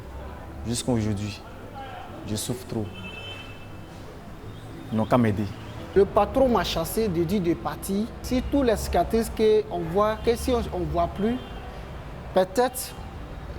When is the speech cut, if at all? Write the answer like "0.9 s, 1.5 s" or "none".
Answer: 6.0 s, 8.2 s